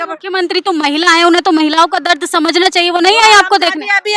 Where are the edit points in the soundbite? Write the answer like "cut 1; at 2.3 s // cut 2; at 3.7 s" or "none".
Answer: none